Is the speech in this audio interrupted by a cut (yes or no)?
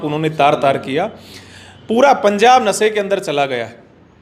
no